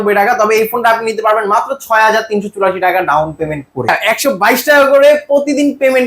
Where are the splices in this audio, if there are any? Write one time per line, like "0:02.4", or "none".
0:04.0